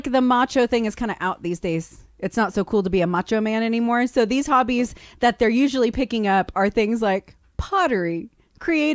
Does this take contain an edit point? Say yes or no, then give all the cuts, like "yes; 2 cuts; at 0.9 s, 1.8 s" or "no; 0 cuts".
no; 0 cuts